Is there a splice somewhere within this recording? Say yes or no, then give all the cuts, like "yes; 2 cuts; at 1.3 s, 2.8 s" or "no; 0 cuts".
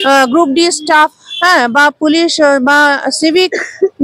no; 0 cuts